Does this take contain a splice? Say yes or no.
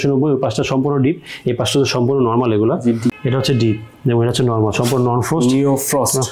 yes